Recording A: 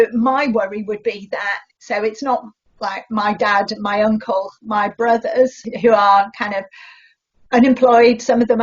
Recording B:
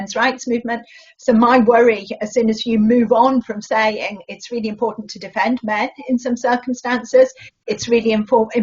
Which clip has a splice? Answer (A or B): A